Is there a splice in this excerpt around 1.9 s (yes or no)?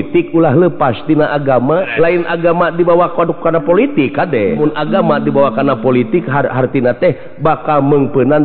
yes